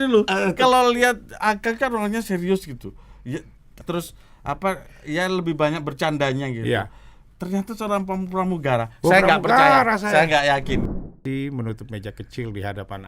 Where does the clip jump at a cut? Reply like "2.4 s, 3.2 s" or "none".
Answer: 3.8 s, 10.9 s